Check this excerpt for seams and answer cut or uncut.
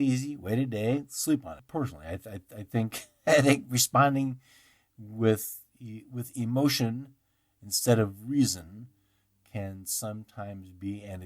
cut